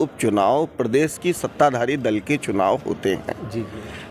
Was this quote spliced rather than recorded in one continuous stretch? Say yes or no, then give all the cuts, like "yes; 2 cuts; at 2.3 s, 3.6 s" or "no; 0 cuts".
no; 0 cuts